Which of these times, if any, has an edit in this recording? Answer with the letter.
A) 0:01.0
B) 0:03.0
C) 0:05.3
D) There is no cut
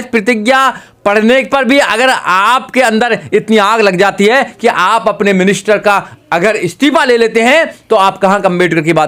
D